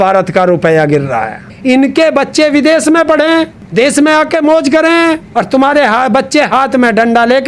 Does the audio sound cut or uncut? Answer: cut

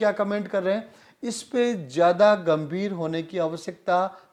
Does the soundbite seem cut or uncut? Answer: uncut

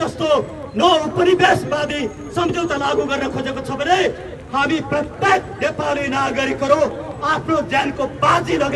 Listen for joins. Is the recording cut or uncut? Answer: uncut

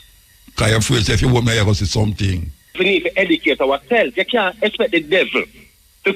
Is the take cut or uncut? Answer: cut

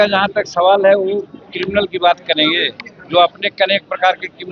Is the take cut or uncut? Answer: uncut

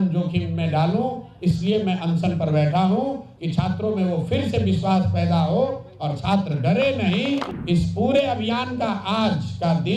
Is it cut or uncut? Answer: cut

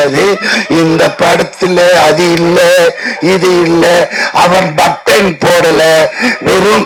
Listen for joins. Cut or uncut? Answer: uncut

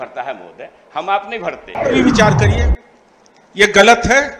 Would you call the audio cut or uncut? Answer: cut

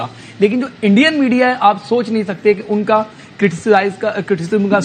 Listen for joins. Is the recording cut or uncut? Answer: uncut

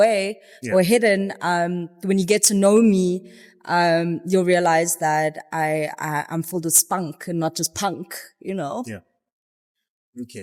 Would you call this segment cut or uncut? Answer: uncut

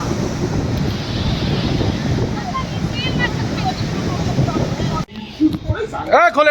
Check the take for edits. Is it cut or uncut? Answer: cut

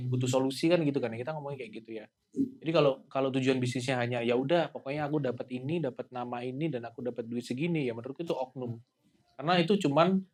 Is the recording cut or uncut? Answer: uncut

